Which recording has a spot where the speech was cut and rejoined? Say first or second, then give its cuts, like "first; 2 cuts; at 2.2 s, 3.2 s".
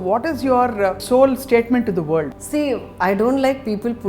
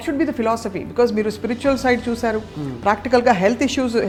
first; 2 cuts; at 1.0 s, 2.3 s